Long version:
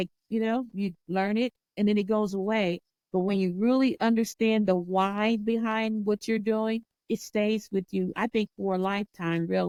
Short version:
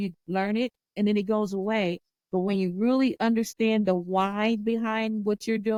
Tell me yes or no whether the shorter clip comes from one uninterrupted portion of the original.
yes